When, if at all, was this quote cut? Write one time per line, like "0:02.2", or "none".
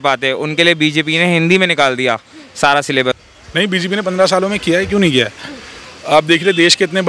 0:03.2